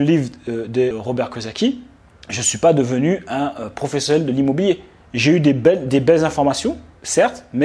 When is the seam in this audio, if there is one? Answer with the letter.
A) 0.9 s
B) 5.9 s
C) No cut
A